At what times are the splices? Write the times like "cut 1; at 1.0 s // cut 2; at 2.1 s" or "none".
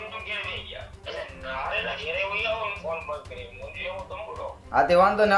cut 1; at 0.9 s // cut 2; at 4.6 s